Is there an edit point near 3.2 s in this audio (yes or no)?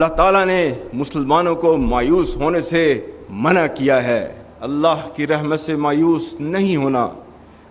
no